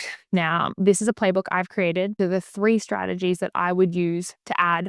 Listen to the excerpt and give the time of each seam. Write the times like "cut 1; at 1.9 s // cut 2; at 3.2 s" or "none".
cut 1; at 2.1 s